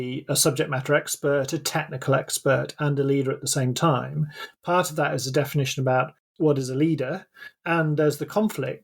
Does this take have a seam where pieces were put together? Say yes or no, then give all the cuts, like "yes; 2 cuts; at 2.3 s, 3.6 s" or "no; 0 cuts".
yes; 2 cuts; at 6.3 s, 7.3 s